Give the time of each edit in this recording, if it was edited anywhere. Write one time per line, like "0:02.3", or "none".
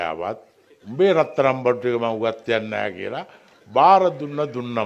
none